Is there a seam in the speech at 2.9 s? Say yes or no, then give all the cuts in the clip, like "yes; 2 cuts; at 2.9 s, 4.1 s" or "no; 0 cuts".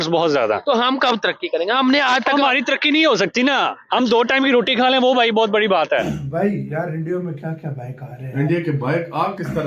no; 1 cut; at 6.0 s